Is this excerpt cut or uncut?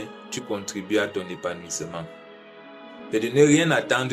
cut